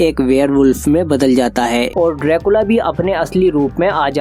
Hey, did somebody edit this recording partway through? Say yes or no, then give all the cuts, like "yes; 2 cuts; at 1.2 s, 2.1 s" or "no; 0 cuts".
yes; 1 cut; at 1.9 s